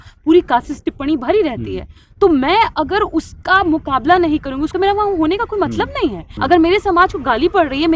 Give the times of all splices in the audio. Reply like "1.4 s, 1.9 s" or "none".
4.6 s, 6.3 s